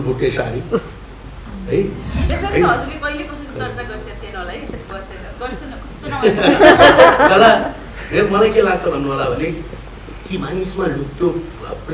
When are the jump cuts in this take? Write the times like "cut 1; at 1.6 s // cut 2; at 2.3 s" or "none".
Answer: cut 1; at 2.2 s